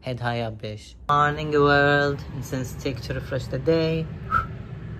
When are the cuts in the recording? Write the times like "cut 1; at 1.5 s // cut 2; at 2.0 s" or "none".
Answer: cut 1; at 0.9 s